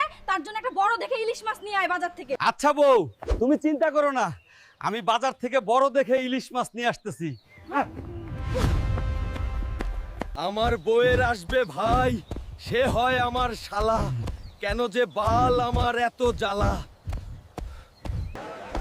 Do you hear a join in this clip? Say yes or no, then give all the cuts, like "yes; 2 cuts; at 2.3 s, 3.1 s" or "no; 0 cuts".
yes; 2 cuts; at 2.4 s, 10.4 s